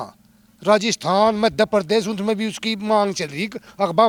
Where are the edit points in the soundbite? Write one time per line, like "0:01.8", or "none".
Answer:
none